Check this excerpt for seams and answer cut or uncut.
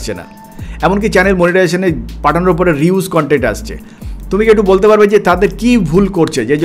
uncut